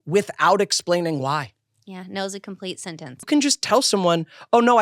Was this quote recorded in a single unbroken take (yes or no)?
no